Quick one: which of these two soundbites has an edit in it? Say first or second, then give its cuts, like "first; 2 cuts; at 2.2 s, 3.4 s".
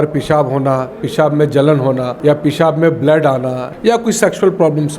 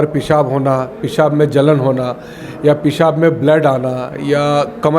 first; 2 cuts; at 2.1 s, 3.6 s